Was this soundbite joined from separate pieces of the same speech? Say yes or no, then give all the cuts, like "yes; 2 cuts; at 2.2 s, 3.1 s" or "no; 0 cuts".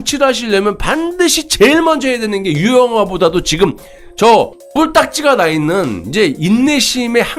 no; 0 cuts